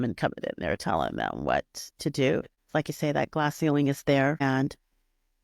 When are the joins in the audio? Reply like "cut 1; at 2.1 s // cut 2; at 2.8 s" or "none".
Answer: cut 1; at 2.6 s // cut 2; at 4.4 s